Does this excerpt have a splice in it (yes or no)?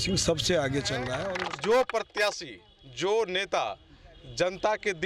yes